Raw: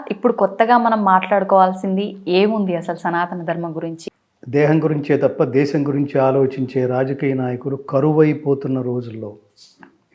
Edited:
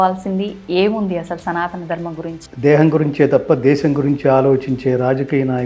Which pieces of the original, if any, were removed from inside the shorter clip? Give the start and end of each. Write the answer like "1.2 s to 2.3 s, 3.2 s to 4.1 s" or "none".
4.0 s to 4.3 s